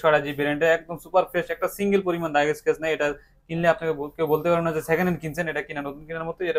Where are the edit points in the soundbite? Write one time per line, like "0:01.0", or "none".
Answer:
none